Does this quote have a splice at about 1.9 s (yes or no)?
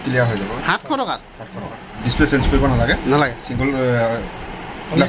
yes